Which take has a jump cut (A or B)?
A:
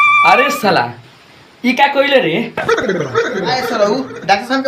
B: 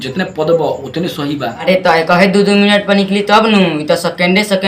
B